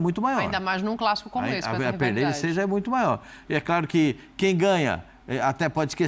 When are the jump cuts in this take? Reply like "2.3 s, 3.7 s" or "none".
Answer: none